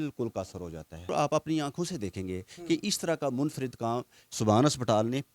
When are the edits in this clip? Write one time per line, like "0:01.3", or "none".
0:01.1